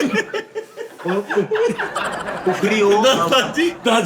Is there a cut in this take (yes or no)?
no